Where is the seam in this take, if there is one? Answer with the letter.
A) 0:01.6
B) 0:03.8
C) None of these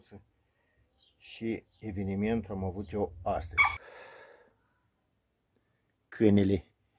B